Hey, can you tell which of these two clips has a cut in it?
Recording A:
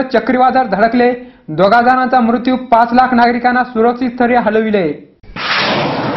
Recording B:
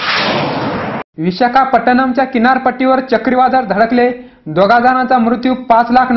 B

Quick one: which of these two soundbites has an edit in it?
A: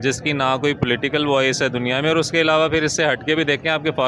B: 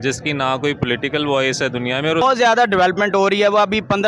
B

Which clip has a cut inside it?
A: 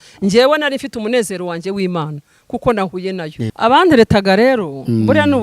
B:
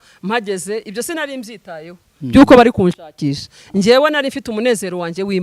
A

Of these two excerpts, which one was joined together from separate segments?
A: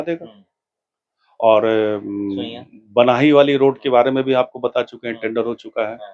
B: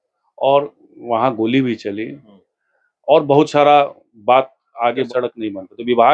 B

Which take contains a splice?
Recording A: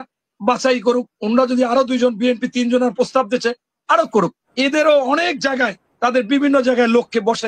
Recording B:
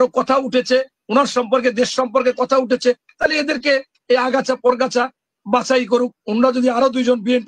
A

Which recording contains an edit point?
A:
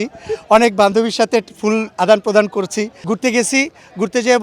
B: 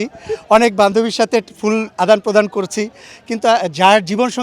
A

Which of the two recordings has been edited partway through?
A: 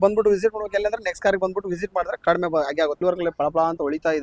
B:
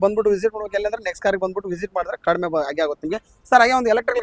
A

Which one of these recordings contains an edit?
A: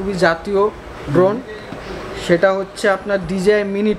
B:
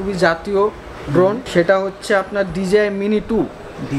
B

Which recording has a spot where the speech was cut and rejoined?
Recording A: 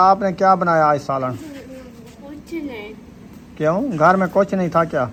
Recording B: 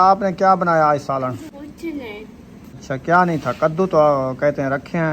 B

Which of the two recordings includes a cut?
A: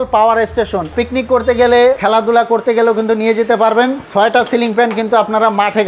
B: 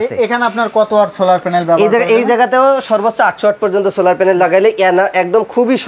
A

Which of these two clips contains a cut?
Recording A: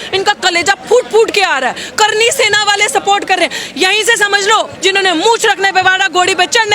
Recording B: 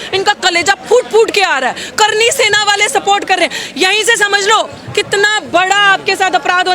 A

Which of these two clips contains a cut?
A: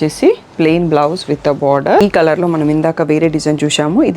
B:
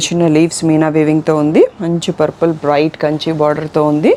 A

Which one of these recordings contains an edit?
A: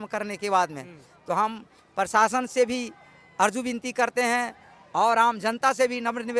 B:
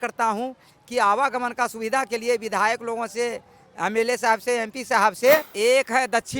B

